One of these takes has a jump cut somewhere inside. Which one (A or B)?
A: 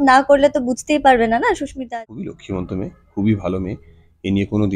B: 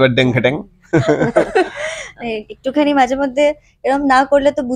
A